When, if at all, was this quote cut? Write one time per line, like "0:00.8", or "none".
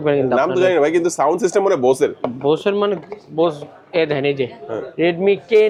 none